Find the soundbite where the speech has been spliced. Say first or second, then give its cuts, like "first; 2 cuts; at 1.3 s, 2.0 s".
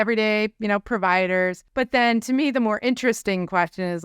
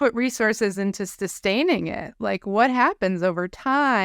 first; 1 cut; at 1.6 s